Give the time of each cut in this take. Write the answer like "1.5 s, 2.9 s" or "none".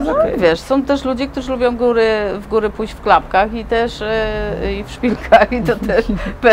none

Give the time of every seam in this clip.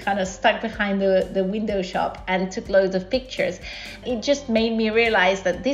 4.0 s

